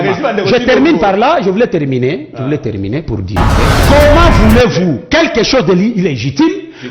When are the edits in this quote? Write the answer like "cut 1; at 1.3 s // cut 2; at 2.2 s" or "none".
cut 1; at 3.8 s